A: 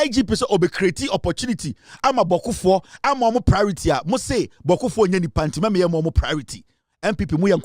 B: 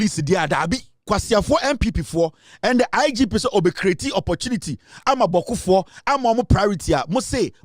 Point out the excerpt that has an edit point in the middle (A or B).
B